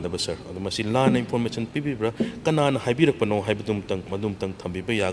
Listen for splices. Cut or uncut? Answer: cut